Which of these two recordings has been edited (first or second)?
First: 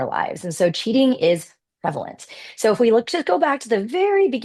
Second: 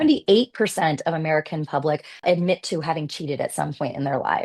second